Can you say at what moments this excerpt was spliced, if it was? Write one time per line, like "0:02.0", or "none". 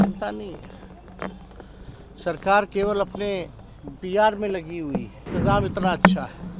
0:05.3